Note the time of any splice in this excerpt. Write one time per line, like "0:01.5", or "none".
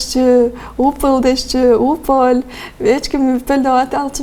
none